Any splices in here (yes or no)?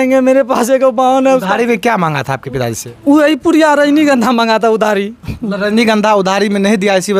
no